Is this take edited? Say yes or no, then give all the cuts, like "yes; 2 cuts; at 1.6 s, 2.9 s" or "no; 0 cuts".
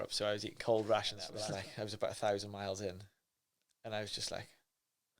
yes; 1 cut; at 1.2 s